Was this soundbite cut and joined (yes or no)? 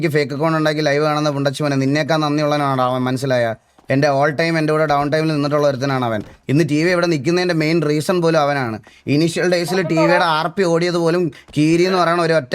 yes